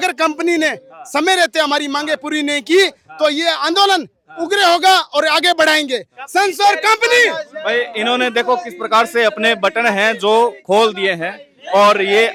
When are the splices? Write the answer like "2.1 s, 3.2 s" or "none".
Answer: none